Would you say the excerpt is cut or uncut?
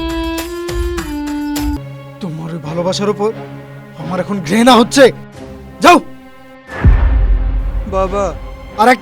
cut